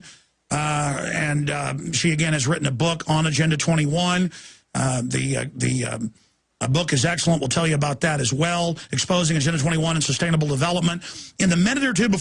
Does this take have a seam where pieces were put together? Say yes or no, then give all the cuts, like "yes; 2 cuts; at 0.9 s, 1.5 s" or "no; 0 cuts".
no; 0 cuts